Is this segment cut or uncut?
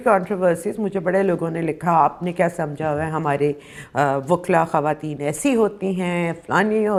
uncut